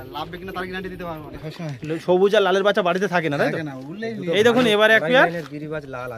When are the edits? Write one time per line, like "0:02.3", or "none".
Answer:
0:01.5